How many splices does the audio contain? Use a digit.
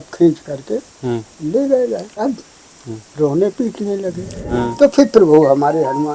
2